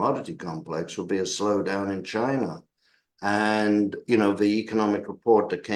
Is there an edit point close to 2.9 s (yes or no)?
no